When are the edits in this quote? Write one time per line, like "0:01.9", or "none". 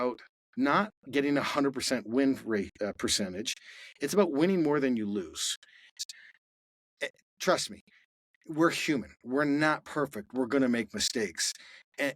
0:05.9